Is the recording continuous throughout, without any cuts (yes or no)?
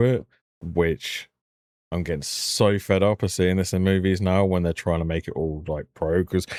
yes